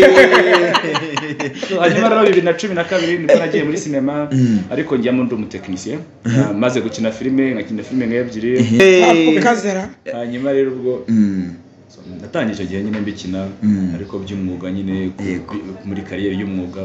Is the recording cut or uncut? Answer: cut